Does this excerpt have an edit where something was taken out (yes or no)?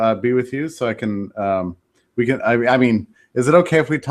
yes